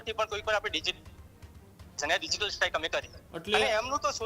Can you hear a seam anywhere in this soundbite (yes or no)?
yes